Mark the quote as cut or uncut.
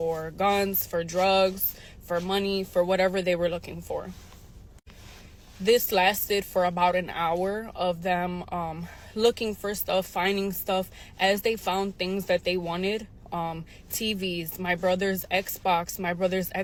uncut